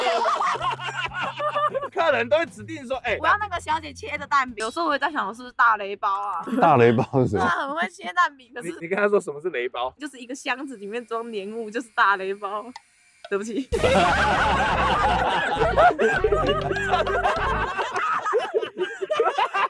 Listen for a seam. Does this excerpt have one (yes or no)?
no